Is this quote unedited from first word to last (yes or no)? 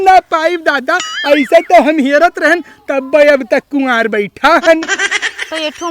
yes